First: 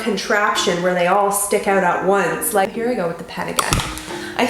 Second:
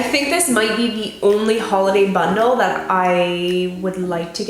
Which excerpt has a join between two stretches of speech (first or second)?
first